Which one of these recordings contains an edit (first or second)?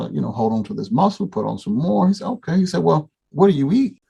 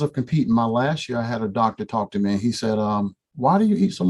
first